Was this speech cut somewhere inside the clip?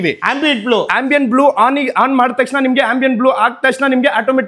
no; 0 cuts

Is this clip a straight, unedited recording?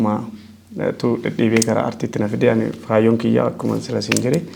yes; 0 cuts

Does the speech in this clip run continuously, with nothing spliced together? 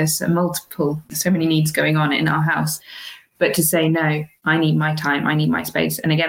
no; 2 cuts; at 1.1 s, 4.3 s

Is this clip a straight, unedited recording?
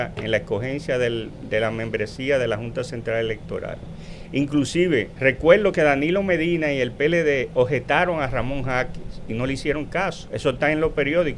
no; 2 cuts; at 5.1 s, 10.2 s

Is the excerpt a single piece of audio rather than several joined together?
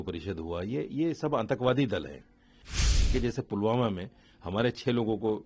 no; 1 cut; at 2.9 s

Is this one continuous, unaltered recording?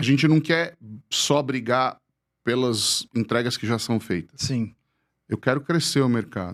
yes; 0 cuts

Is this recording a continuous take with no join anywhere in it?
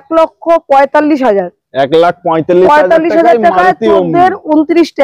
yes; 0 cuts

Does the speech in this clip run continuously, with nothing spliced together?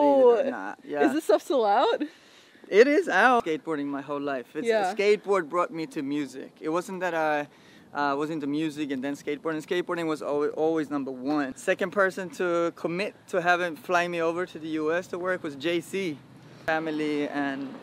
no; 3 cuts; at 3.4 s, 11.5 s, 16.6 s

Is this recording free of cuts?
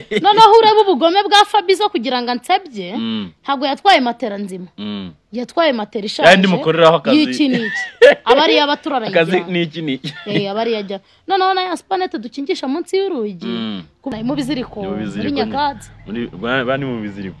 no; 1 cut; at 14.1 s

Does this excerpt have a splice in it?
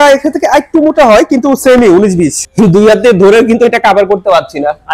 yes; 1 cut; at 2.4 s

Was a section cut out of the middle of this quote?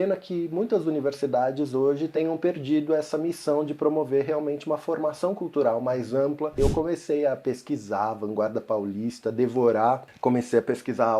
yes; 2 cuts; at 2.1 s, 6.6 s

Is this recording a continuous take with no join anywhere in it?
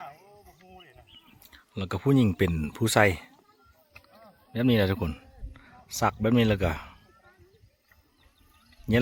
yes; 0 cuts

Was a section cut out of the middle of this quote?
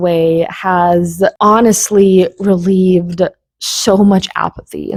no; 0 cuts

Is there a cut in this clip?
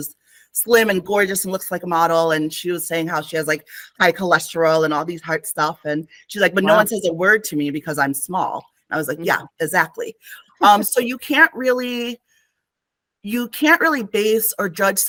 no; 0 cuts

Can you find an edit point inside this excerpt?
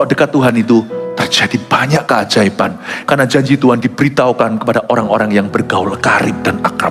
no; 0 cuts

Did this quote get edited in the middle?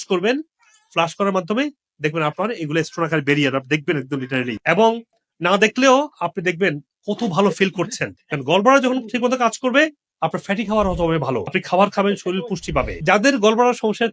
no; 0 cuts

